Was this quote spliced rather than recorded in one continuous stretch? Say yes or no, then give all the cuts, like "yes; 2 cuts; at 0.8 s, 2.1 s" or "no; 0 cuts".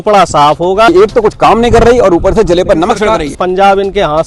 yes; 2 cuts; at 0.9 s, 3.3 s